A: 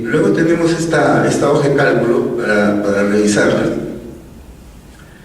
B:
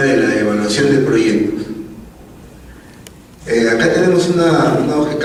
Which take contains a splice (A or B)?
A